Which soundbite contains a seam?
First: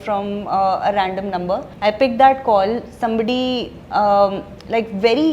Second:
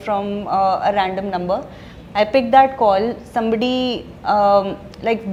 first; 1 cut; at 1.7 s

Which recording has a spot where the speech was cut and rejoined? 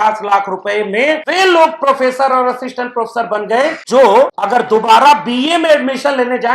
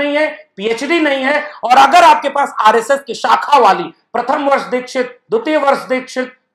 first; 3 cuts; at 1.2 s, 3.8 s, 4.4 s

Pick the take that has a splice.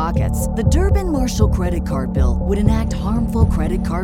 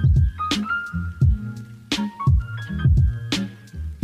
second; 1 cut; at 3.1 s

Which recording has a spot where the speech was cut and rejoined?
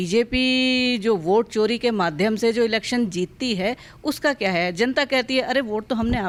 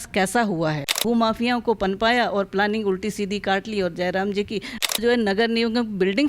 second; 2 cuts; at 1.0 s, 4.9 s

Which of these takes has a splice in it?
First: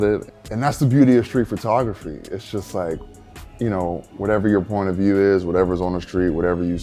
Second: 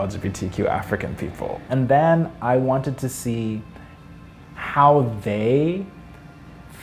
second; 1 cut; at 1.7 s

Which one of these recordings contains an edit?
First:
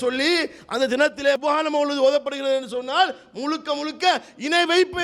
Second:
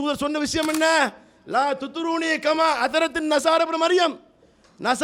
first; 1 cut; at 1.4 s

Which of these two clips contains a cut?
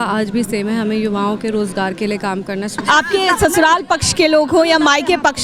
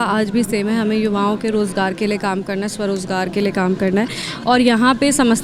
first; 1 cut; at 2.8 s

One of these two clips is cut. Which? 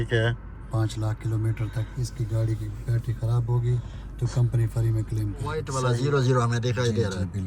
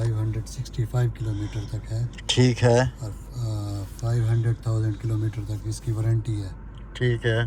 first; 1 cut; at 5.7 s

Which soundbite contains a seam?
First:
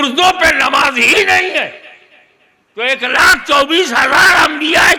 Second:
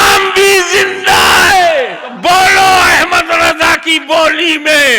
second; 1 cut; at 2.1 s

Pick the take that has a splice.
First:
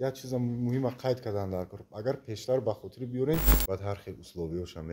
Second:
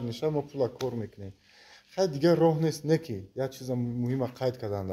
first; 1 cut; at 3.5 s

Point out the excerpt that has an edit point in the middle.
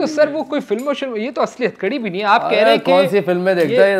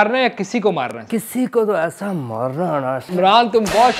second; 2 cuts; at 1.0 s, 3.1 s

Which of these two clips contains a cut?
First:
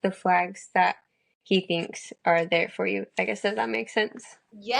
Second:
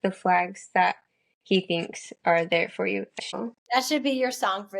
second; 1 cut; at 3.4 s

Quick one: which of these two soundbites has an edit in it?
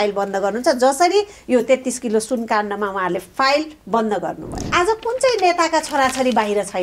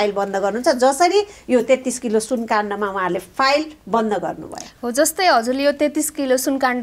first; 1 cut; at 4.7 s

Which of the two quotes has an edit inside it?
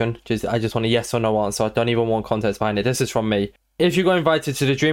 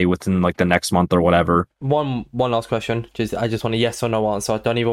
second; 1 cut; at 1.7 s

